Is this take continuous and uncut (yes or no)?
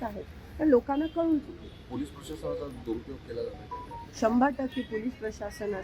yes